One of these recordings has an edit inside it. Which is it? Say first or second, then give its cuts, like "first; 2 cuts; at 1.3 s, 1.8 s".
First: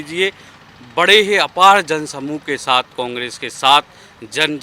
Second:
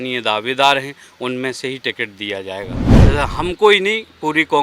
second; 1 cut; at 2.9 s